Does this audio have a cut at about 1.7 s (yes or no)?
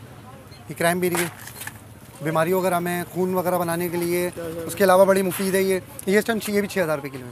no